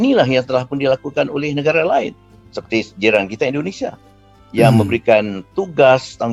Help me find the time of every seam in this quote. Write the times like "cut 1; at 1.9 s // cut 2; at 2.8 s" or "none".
none